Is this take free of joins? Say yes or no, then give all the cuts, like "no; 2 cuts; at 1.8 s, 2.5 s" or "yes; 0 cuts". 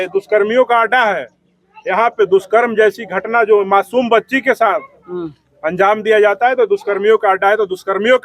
yes; 0 cuts